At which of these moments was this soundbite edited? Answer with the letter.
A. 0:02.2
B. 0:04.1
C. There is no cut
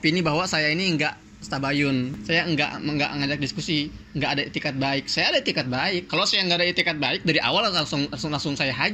A